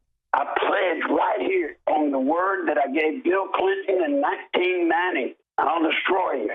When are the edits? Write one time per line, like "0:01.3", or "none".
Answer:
0:05.4